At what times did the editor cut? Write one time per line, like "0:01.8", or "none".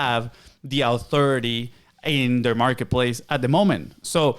none

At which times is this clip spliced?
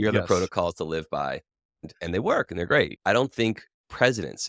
0:01.9
0:02.9

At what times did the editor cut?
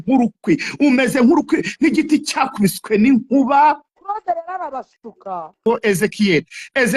0:05.7

